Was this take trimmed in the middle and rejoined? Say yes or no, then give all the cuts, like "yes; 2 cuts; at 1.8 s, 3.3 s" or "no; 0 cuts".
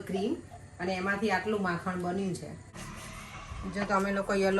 yes; 1 cut; at 2.8 s